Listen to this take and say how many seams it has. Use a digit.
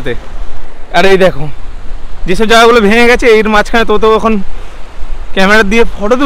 0